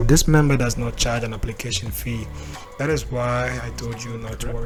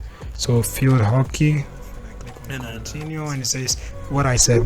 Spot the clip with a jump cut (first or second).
second